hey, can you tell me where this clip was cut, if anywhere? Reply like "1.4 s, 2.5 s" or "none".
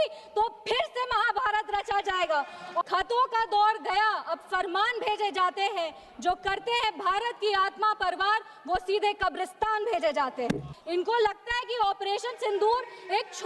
2.8 s, 10.7 s